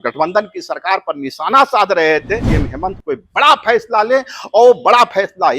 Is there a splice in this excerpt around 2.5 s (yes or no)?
yes